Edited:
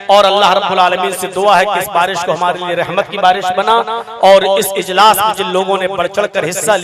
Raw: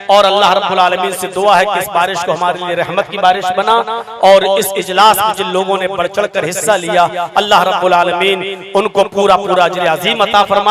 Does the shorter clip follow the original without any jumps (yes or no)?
yes